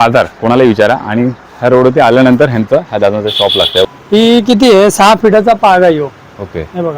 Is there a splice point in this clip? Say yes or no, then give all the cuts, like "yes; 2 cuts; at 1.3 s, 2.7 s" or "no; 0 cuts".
yes; 1 cut; at 3.9 s